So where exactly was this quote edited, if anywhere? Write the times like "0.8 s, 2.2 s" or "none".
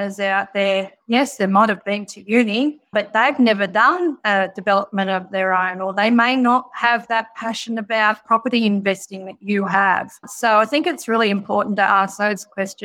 none